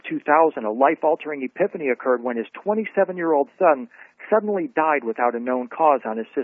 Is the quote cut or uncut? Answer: uncut